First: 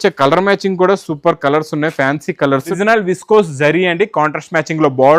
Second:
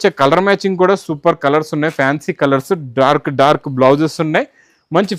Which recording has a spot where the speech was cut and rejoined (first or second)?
first